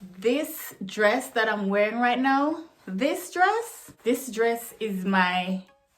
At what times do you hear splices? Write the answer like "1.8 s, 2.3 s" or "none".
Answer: 3.9 s